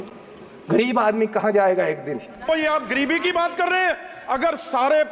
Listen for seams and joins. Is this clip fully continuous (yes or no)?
no